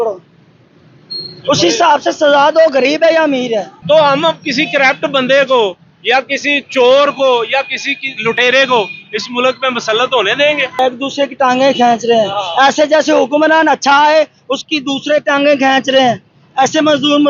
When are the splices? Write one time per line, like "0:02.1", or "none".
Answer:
0:03.7
0:10.8